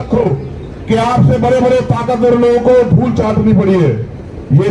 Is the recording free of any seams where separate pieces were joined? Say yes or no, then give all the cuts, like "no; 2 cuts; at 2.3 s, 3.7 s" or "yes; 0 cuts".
yes; 0 cuts